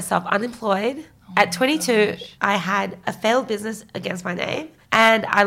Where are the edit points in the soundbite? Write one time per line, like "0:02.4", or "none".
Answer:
0:02.3